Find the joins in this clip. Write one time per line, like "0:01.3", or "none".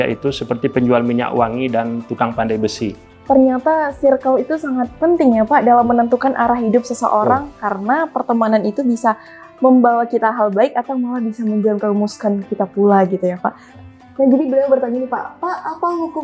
0:03.1
0:13.7